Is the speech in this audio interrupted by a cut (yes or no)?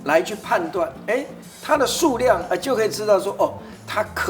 no